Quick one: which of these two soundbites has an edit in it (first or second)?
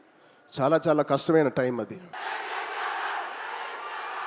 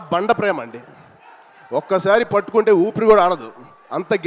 first